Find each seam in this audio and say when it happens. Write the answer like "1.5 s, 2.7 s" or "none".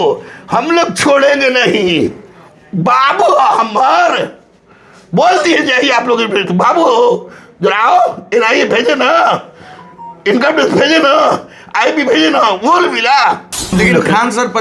13.7 s